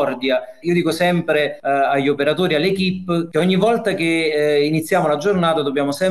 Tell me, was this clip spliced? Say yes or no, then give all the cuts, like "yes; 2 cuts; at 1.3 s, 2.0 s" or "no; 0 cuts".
yes; 2 cuts; at 1.6 s, 3.3 s